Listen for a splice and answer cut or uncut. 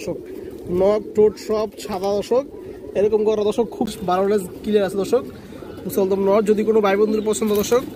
cut